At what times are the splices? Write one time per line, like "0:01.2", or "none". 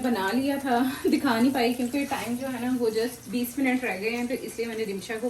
none